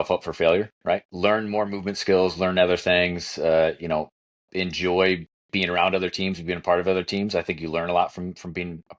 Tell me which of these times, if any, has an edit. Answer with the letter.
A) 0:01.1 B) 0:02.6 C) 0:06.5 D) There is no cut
A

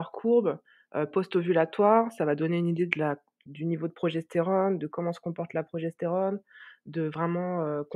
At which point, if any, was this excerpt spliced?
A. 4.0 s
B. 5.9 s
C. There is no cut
C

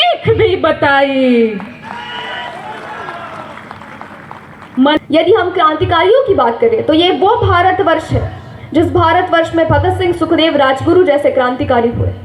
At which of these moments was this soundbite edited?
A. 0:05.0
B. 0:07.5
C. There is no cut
A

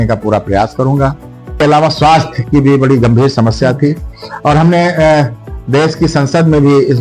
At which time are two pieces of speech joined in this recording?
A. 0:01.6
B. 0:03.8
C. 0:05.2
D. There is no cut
A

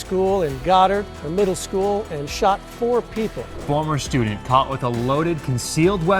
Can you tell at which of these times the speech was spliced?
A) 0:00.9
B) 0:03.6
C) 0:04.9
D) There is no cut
B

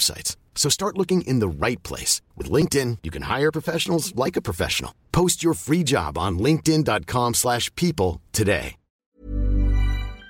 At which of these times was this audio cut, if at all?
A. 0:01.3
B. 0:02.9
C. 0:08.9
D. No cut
C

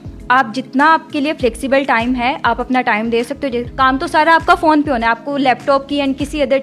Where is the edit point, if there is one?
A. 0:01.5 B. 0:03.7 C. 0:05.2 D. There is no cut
B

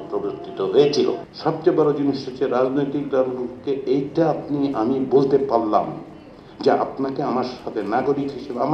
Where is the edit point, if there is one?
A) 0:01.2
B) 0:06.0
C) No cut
A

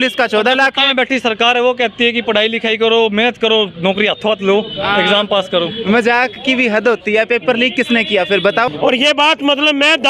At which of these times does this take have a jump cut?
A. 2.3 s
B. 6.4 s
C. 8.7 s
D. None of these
C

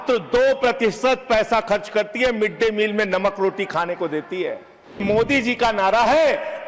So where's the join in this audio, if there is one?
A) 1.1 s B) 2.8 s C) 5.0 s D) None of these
C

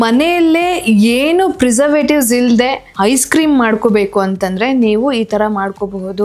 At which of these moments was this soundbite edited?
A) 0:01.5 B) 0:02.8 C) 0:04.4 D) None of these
B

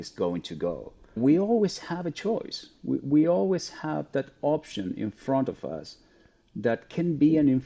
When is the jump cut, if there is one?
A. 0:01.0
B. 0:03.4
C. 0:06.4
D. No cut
A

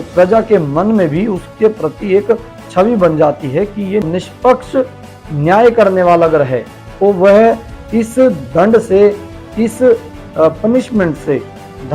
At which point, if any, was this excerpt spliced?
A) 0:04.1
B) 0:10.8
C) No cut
A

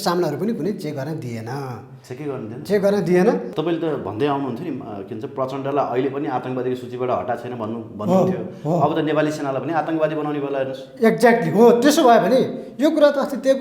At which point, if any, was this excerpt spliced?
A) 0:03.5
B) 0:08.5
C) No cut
A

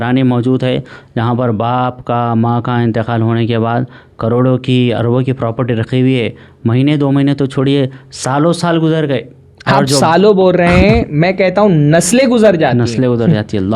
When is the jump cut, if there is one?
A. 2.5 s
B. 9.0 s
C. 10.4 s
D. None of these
D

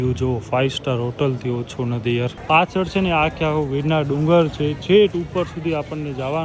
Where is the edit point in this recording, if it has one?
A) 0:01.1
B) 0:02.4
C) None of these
B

